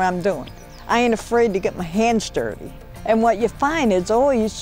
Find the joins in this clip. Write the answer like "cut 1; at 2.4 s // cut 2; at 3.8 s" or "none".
none